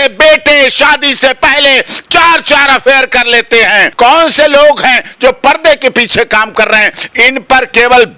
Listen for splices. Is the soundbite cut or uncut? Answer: cut